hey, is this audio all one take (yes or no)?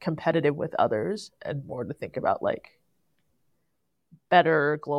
yes